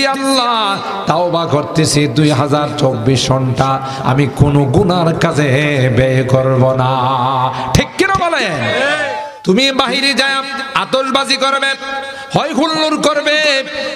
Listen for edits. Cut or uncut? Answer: cut